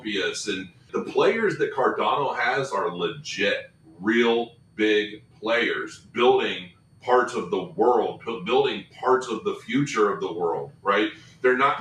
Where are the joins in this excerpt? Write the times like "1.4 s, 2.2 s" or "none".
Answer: 0.9 s